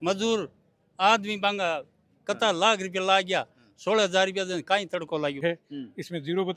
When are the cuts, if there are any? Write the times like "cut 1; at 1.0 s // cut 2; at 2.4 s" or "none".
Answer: cut 1; at 5.4 s